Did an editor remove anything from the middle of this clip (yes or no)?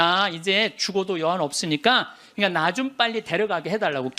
yes